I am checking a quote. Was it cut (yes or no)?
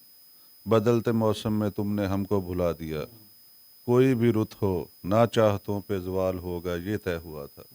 no